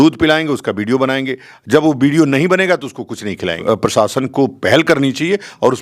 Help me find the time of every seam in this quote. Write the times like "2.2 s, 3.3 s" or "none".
3.6 s